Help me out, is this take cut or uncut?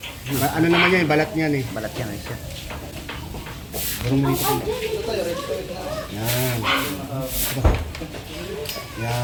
uncut